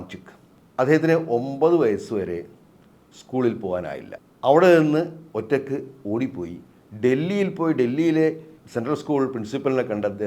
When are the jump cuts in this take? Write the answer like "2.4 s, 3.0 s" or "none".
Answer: 4.1 s